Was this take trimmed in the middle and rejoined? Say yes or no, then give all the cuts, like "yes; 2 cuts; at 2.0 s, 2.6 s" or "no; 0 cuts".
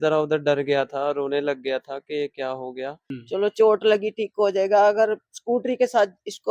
yes; 1 cut; at 3.1 s